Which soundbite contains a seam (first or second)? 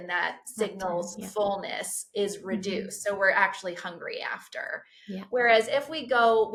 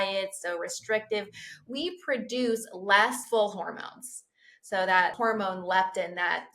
second